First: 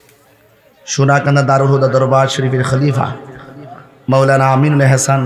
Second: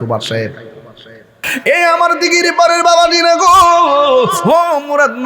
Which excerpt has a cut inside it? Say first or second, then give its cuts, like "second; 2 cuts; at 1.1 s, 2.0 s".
second; 1 cut; at 1.5 s